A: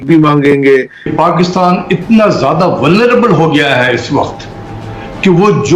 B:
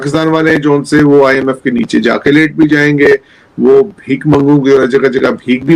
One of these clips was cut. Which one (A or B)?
A